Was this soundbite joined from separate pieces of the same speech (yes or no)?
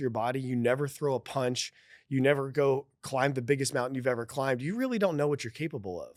no